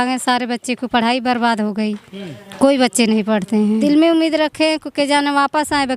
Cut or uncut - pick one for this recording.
cut